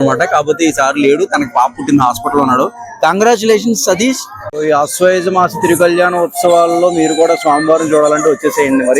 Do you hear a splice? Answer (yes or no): yes